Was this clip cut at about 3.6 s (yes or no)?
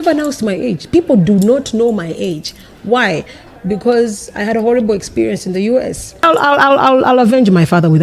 no